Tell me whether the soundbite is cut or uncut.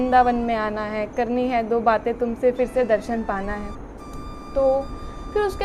uncut